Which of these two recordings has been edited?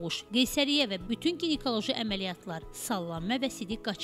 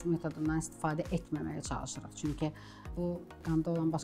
second; 1 cut; at 2.9 s

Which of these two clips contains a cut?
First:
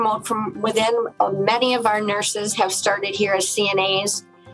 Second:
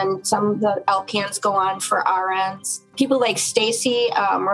second; 1 cut; at 2.8 s

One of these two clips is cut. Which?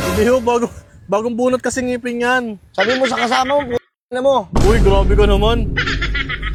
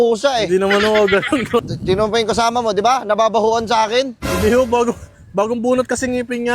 second; 1 cut; at 1.7 s

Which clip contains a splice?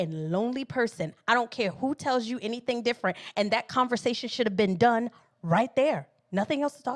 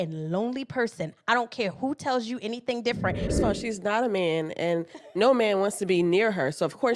second; 1 cut; at 3.3 s

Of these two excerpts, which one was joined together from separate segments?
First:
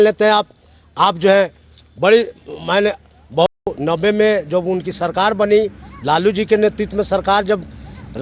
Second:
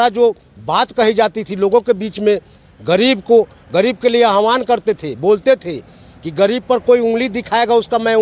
first; 1 cut; at 3.7 s

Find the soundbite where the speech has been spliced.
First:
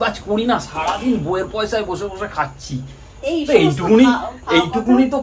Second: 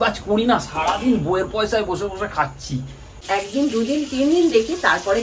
second; 1 cut; at 3.2 s

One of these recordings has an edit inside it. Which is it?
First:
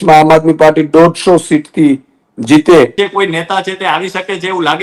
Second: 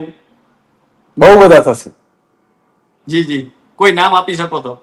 first; 1 cut; at 2.9 s

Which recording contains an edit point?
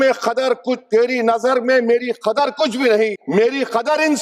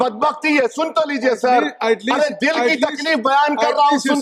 first; 1 cut; at 3.2 s

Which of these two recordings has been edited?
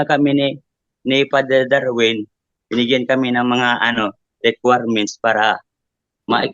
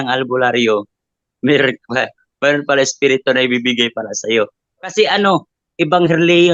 second; 1 cut; at 4.9 s

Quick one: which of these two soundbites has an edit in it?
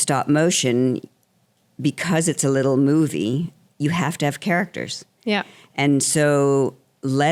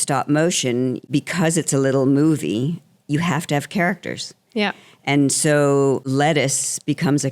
second; 2 cuts; at 1.0 s, 6.0 s

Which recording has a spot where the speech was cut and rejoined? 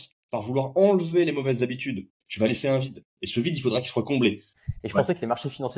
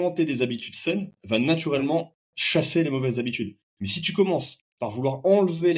first; 2 cuts; at 2.2 s, 4.5 s

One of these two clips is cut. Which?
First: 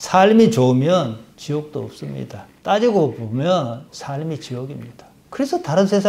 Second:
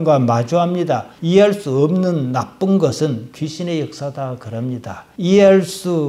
first; 1 cut; at 3.9 s

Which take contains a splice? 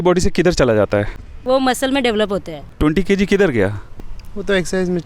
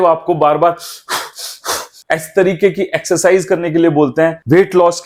first; 2 cuts; at 1.3 s, 2.7 s

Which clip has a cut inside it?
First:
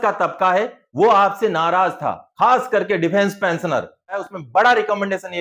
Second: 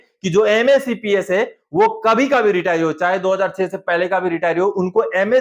first; 1 cut; at 4.2 s

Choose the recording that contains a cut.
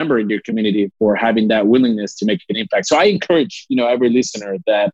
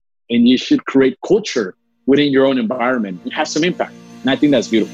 second; 1 cut; at 4.0 s

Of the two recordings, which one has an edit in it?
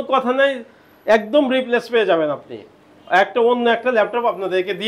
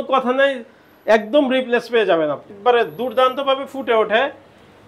second; 1 cut; at 2.5 s

